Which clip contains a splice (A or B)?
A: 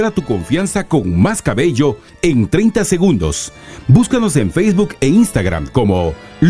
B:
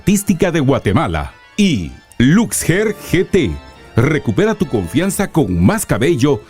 B